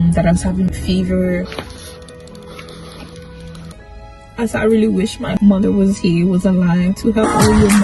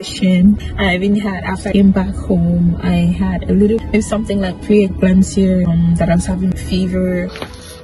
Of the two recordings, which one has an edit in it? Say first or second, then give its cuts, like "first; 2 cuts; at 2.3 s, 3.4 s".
first; 1 cut; at 3.7 s